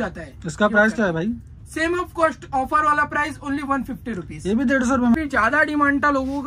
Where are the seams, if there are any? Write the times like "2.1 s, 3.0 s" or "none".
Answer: 5.1 s